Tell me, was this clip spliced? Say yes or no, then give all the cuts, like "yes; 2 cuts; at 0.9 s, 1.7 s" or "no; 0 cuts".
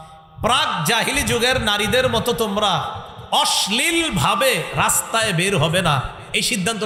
no; 0 cuts